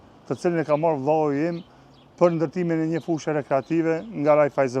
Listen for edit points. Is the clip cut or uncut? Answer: uncut